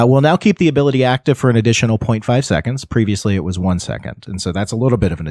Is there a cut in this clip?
no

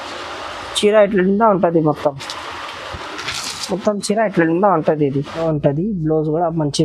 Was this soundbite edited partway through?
yes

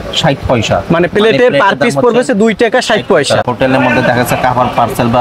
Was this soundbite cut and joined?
yes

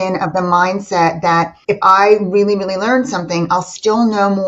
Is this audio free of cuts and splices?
no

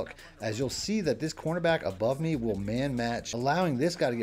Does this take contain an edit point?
yes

